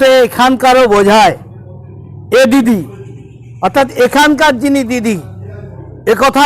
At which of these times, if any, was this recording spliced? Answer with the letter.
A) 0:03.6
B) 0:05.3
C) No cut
C